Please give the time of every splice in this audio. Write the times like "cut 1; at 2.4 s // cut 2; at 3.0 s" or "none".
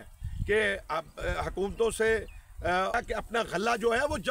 cut 1; at 2.9 s